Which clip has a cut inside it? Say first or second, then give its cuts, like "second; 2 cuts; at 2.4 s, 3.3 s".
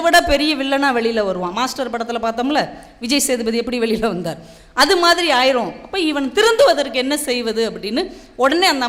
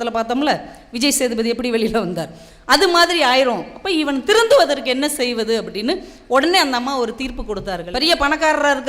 second; 1 cut; at 7.9 s